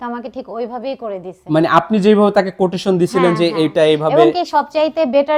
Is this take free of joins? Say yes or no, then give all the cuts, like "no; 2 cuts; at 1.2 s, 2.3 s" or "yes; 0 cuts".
yes; 0 cuts